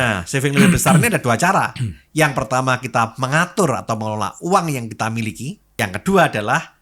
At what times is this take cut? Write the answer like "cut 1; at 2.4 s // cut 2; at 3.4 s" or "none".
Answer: cut 1; at 5.6 s